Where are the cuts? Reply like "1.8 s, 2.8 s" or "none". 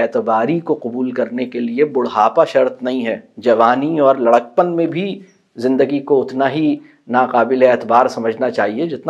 none